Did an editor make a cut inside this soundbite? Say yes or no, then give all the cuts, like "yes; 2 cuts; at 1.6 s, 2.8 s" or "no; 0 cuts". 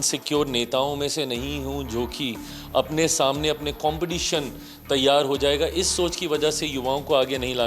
no; 0 cuts